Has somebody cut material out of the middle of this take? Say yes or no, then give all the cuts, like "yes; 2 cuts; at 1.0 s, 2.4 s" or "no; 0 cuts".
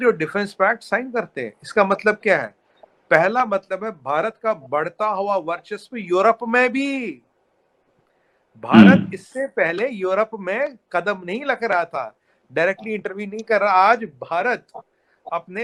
no; 0 cuts